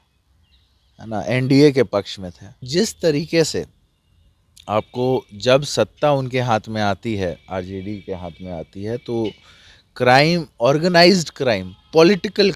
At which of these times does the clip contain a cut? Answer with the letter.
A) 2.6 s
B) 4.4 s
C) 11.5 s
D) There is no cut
A